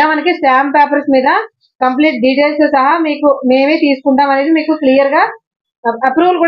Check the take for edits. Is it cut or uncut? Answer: uncut